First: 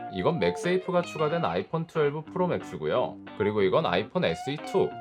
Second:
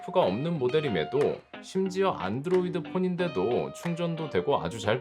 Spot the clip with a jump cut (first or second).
first